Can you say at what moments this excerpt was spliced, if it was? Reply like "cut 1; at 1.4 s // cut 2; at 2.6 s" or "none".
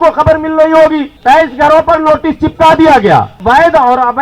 cut 1; at 1.1 s // cut 2; at 3.4 s